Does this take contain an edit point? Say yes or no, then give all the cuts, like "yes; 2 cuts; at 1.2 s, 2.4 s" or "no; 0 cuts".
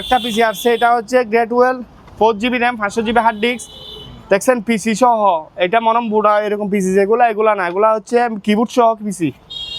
no; 0 cuts